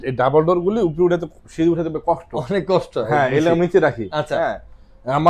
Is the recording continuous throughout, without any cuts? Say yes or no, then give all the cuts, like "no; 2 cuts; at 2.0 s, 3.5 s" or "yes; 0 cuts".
yes; 0 cuts